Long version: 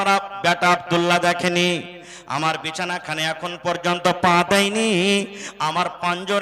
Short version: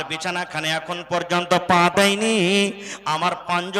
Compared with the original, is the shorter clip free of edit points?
yes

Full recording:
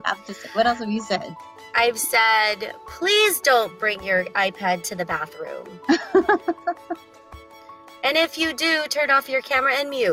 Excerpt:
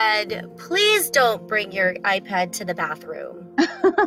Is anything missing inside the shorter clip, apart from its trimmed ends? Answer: no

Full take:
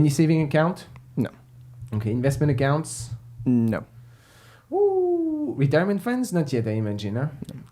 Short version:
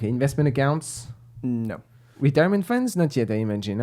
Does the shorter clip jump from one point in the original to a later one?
yes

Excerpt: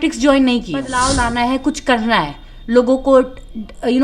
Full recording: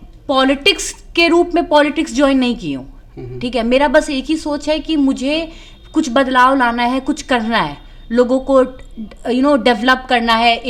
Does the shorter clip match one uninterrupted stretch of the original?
no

